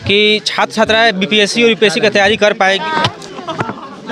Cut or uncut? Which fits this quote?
cut